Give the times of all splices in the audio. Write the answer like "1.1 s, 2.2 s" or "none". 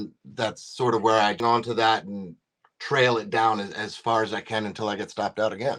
1.4 s